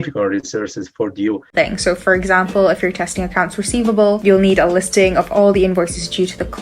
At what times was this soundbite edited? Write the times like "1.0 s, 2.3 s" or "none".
1.5 s

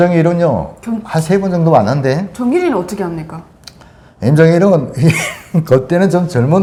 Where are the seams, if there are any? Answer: none

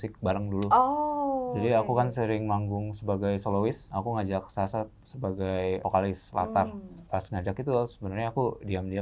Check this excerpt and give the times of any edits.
3.8 s, 5.8 s, 6.9 s

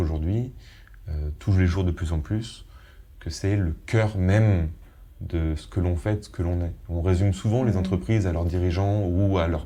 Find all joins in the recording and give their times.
none

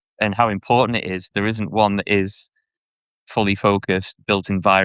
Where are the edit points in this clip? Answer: 1.3 s

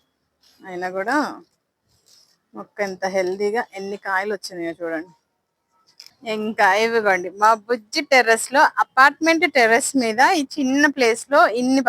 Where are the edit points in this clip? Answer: 6.3 s

